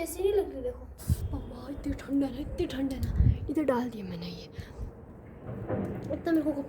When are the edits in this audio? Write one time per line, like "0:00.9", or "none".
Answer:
0:01.3